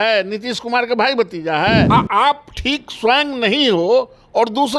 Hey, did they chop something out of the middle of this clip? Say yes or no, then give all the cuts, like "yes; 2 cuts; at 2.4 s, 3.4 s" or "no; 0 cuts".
yes; 1 cut; at 1.9 s